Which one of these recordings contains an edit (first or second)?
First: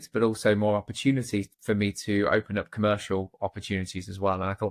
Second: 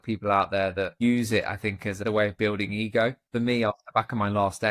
second